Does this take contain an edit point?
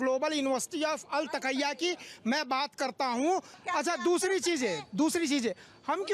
yes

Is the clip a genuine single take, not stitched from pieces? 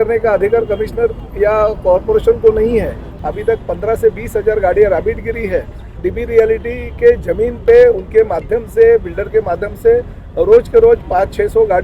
no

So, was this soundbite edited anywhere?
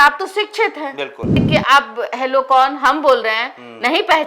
yes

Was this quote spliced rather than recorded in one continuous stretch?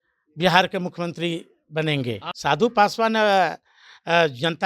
yes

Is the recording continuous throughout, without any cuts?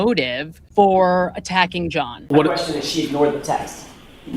no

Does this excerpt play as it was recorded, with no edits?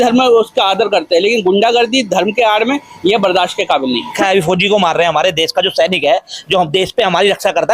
no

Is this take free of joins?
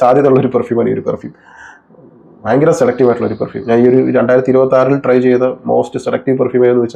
yes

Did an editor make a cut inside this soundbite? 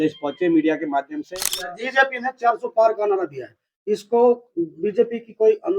yes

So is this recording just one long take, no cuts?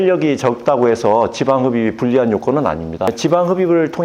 no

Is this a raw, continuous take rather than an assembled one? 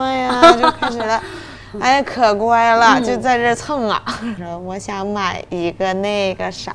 no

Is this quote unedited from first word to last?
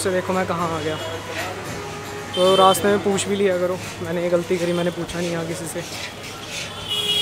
yes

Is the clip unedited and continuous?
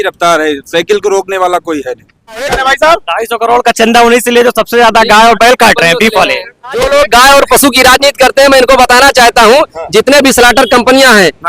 no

